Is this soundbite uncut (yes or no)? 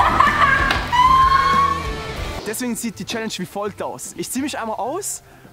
no